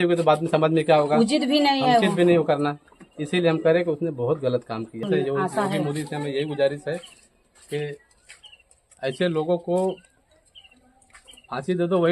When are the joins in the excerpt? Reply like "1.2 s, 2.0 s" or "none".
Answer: 5.1 s